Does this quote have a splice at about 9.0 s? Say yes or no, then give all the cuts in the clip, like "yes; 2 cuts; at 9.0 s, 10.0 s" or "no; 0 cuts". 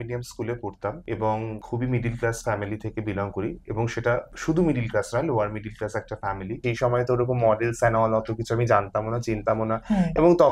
no; 4 cuts; at 1.0 s, 1.6 s, 4.3 s, 6.6 s